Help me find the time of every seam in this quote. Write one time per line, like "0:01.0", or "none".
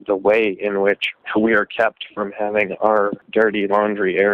0:01.1
0:03.2